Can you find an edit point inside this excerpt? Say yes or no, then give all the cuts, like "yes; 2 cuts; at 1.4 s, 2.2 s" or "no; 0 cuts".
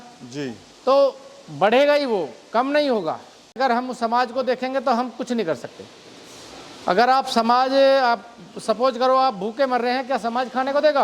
yes; 1 cut; at 3.6 s